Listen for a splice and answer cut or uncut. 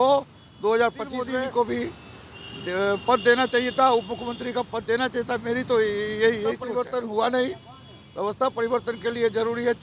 cut